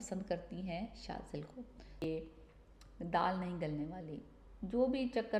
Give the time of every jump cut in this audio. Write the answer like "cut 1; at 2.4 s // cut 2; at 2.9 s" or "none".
cut 1; at 2.0 s